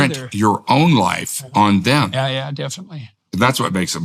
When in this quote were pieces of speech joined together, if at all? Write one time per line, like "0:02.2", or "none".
0:03.1